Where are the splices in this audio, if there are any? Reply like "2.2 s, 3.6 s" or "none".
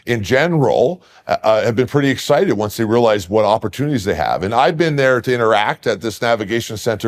none